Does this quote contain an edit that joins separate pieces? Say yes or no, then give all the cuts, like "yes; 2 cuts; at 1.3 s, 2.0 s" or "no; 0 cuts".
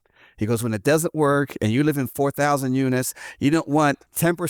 no; 0 cuts